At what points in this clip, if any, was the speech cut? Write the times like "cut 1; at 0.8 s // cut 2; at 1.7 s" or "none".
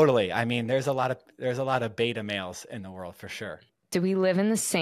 cut 1; at 3.7 s